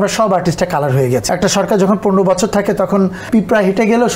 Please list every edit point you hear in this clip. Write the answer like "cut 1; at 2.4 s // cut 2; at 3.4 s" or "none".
cut 1; at 1.2 s // cut 2; at 3.3 s